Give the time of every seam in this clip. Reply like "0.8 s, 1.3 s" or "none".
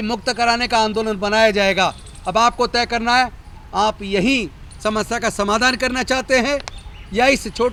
none